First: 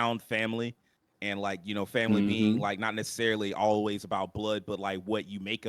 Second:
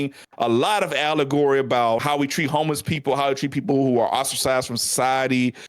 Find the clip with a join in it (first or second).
second